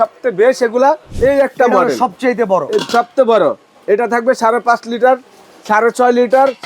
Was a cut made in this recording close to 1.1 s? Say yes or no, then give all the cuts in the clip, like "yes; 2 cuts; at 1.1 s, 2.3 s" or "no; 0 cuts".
yes; 1 cut; at 1.1 s